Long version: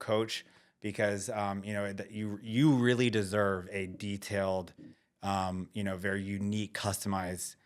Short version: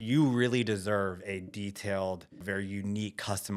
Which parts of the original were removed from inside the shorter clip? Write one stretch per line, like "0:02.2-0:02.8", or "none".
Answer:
0:04.9-0:06.0